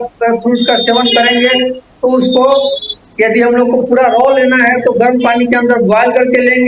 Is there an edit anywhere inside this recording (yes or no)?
no